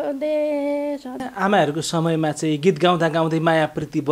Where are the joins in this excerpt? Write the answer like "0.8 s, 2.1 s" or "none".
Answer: 1.3 s